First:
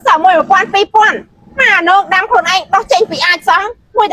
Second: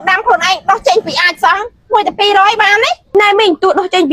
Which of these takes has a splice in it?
second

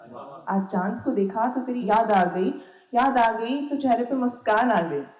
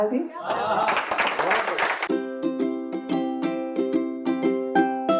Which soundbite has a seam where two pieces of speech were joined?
second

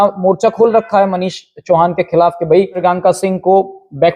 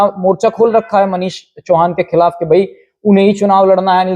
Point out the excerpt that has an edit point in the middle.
first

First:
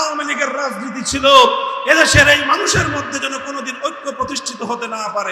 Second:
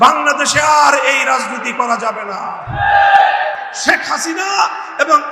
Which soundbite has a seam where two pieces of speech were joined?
second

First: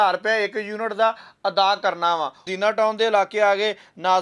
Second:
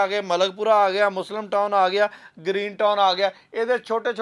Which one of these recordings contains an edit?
first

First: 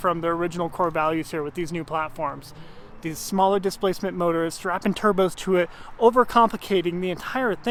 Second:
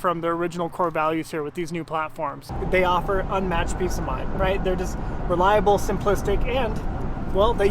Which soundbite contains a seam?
second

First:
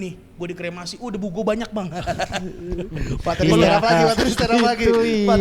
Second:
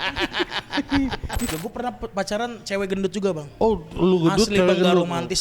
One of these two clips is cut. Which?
second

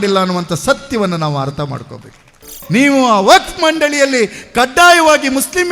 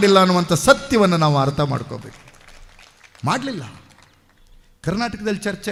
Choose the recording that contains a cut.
first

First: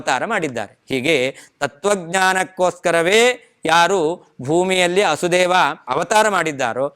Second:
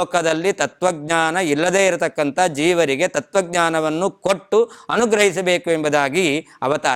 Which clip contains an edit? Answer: first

